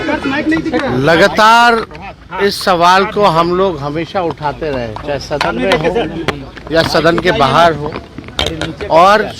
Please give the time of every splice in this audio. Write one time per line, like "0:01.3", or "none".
none

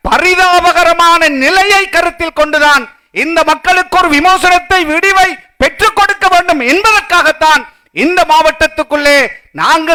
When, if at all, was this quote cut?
none

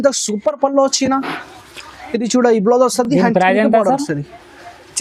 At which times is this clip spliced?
none

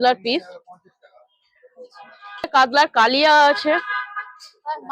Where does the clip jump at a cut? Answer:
0:02.5

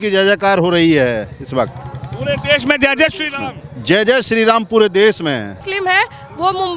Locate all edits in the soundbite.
0:05.6

